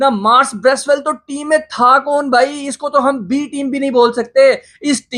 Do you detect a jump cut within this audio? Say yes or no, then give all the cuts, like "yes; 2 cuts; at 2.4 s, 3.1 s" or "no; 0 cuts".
no; 0 cuts